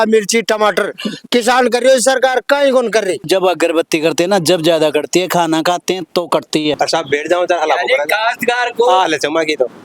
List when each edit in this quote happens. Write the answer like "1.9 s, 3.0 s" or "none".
3.3 s, 6.8 s